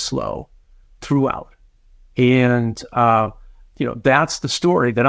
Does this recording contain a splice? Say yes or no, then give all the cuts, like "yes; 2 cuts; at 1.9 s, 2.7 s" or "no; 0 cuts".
no; 0 cuts